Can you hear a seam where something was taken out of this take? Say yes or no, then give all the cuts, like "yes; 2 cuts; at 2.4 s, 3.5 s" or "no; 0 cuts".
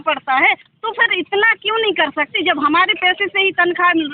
no; 0 cuts